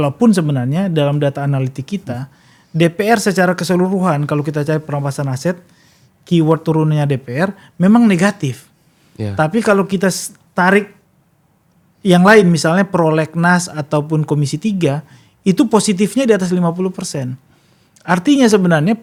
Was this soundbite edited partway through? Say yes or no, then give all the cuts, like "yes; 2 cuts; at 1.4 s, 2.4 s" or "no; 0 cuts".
no; 0 cuts